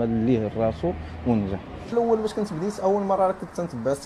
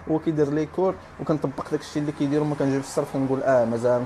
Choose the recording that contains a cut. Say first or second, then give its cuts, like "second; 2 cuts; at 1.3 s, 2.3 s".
first; 1 cut; at 1.9 s